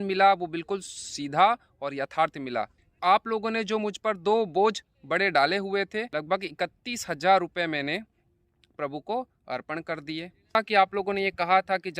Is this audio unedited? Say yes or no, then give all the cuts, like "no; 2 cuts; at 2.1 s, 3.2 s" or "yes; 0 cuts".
no; 3 cuts; at 2.8 s, 6.1 s, 10.6 s